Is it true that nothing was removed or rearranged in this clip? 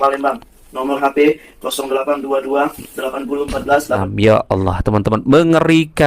no; 1 cut; at 4.1 s

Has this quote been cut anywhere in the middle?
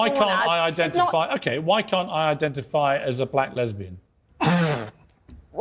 no; 0 cuts

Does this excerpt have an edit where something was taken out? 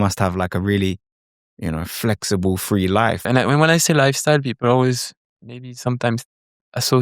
yes; 1 cut; at 3.2 s

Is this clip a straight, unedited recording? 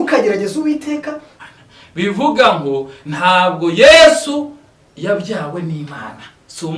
no; 1 cut; at 1.3 s

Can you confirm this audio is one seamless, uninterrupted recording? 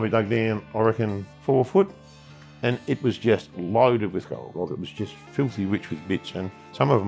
no; 2 cuts; at 1.3 s, 4.5 s

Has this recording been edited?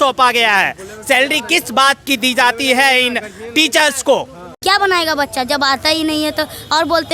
yes; 1 cut; at 4.5 s

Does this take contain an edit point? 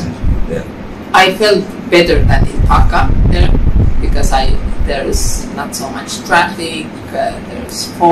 yes; 1 cut; at 1.0 s

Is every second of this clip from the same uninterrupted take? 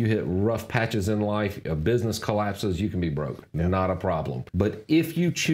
no; 1 cut; at 4.4 s

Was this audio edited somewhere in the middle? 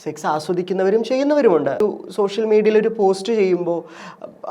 yes; 1 cut; at 1.8 s

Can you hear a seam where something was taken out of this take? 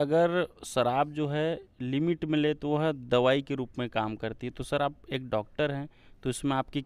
no; 0 cuts

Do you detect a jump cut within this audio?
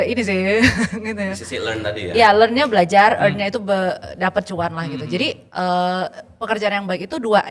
no; 0 cuts

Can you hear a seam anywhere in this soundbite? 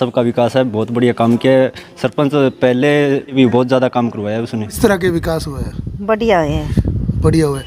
yes; 2 cuts; at 3.3 s, 4.8 s

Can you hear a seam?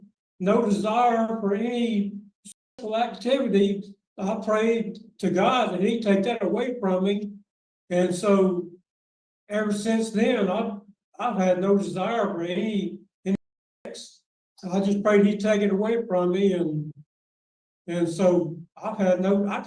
no; 0 cuts

